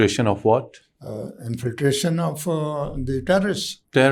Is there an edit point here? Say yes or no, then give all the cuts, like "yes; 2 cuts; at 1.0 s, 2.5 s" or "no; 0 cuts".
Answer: no; 0 cuts